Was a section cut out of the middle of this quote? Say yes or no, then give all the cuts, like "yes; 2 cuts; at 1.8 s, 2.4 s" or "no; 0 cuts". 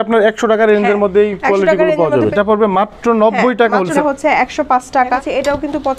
yes; 3 cuts; at 2.3 s, 4.0 s, 5.2 s